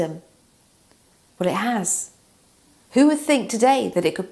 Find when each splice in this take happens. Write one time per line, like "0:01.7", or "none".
none